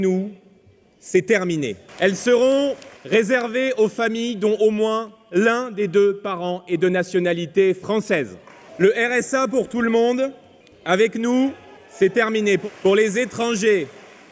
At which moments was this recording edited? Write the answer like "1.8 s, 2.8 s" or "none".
1.8 s